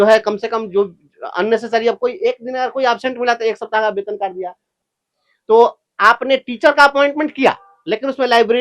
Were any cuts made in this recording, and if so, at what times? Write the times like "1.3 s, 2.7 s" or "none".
4.7 s